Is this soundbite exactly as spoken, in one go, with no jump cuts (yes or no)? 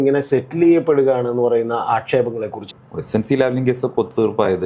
no